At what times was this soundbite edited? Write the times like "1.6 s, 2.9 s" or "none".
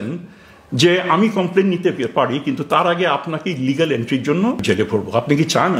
4.6 s